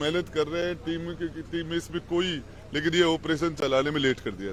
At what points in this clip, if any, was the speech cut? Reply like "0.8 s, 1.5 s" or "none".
none